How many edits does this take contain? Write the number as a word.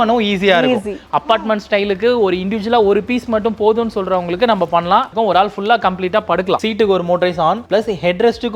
three